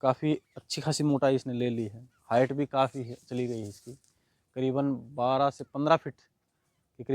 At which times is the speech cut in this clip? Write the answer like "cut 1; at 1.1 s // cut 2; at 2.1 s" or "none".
none

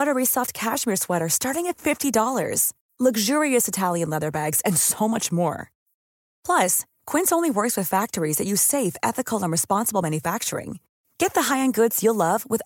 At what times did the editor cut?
none

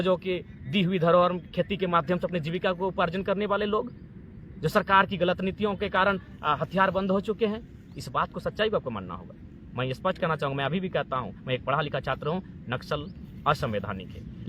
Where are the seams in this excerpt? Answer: none

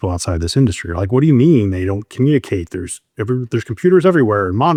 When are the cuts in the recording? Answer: none

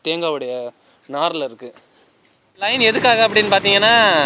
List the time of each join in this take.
cut 1; at 2.7 s

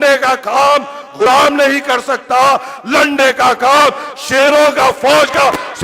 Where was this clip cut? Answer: cut 1; at 1.2 s

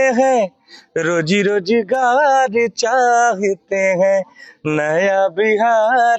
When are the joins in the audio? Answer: none

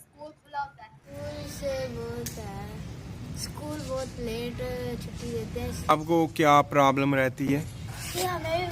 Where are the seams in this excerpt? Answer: cut 1; at 1.1 s // cut 2; at 5.9 s

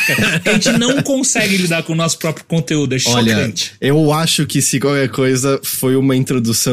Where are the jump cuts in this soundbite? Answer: none

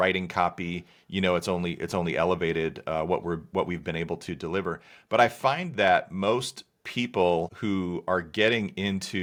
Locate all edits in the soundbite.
none

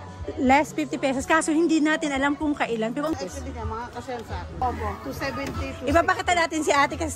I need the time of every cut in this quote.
cut 1; at 3.1 s // cut 2; at 4.6 s

